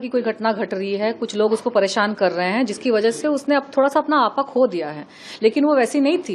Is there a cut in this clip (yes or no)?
no